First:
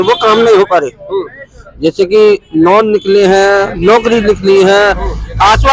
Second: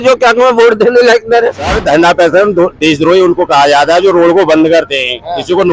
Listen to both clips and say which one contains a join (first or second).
second